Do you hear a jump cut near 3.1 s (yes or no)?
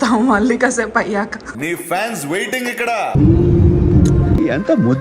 yes